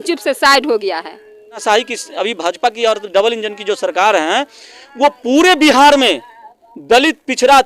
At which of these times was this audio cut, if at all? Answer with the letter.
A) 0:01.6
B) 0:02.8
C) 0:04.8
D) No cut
A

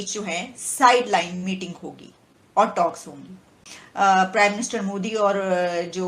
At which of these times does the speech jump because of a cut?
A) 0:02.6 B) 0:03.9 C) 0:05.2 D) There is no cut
D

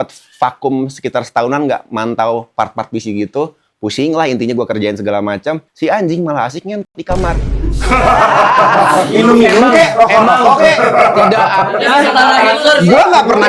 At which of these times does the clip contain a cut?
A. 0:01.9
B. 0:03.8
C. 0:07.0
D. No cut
D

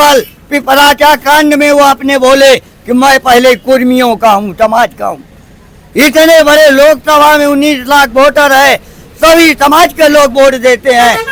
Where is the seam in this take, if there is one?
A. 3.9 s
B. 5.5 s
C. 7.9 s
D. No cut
D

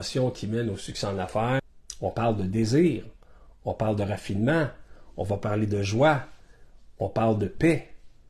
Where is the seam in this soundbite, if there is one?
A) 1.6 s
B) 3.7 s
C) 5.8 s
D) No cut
A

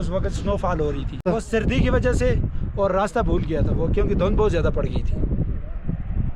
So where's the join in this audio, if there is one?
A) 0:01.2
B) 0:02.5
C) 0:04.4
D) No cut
A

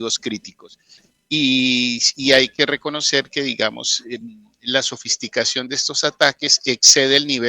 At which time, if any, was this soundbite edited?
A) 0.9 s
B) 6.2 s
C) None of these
A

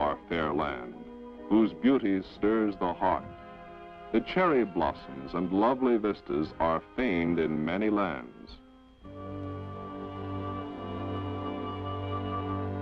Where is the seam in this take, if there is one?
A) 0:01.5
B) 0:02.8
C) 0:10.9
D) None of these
B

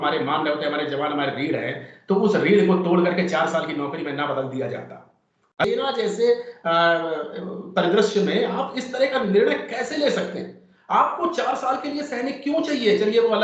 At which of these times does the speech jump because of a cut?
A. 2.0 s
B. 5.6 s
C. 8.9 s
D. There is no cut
B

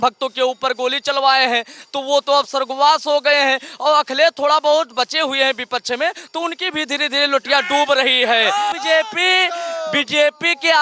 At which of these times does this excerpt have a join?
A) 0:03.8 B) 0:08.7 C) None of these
B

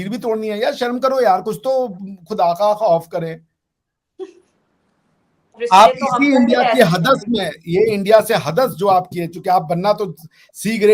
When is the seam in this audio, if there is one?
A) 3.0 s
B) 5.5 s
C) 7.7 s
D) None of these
B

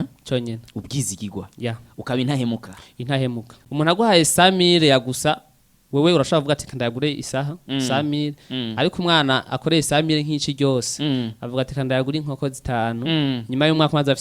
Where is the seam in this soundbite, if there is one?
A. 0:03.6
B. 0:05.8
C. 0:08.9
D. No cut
A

